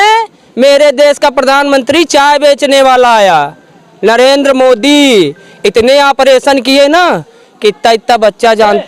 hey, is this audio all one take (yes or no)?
yes